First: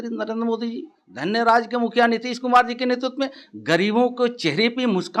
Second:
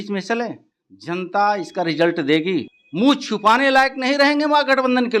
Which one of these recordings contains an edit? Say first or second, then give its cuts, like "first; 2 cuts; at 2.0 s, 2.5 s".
second; 1 cut; at 2.8 s